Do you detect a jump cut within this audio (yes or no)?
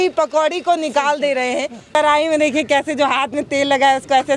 yes